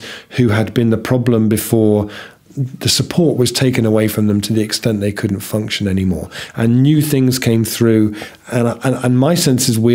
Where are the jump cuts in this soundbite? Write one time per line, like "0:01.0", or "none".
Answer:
0:02.4

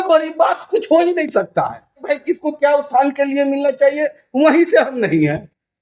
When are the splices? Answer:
0:02.1

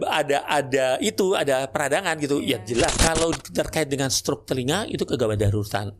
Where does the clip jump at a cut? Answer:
0:02.9

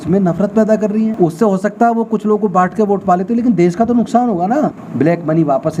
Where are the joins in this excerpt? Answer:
0:01.1
0:04.8

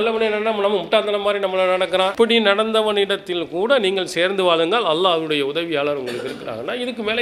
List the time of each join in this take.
none

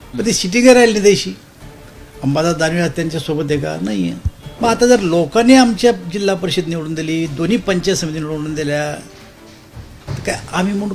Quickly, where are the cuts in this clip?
0:04.6

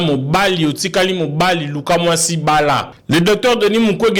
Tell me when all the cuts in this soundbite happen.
0:02.9

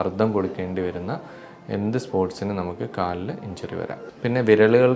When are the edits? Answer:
0:04.1

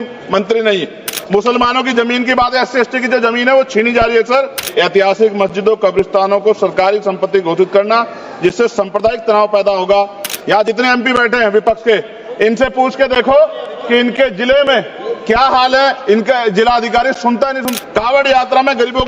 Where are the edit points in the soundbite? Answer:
0:01.1
0:04.6
0:10.3
0:17.7

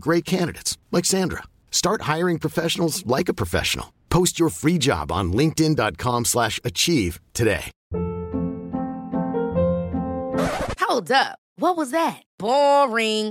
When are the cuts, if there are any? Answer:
0:07.7

